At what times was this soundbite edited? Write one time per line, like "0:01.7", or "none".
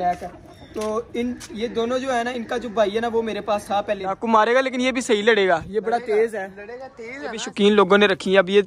0:04.2
0:07.4